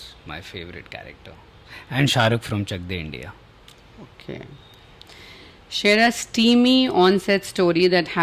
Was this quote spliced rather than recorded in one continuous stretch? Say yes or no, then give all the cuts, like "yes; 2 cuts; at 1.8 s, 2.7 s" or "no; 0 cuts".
no; 0 cuts